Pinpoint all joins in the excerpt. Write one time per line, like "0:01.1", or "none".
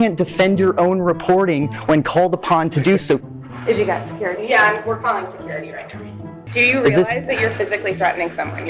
0:06.4